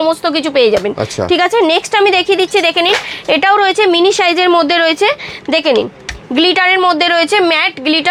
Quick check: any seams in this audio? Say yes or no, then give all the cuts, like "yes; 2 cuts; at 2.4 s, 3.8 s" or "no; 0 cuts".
no; 0 cuts